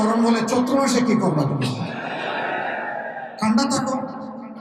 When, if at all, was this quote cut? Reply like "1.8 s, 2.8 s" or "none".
none